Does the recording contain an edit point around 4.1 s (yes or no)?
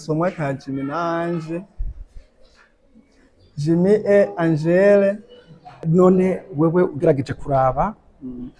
no